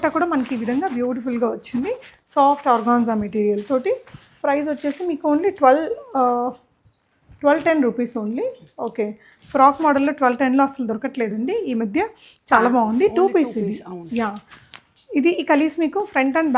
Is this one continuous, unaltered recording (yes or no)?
yes